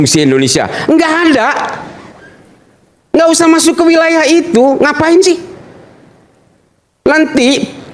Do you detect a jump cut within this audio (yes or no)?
no